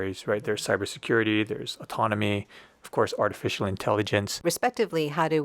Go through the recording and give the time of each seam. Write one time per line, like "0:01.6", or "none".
0:04.4